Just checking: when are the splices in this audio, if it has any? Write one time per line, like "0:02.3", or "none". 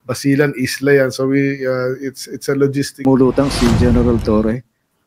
0:02.9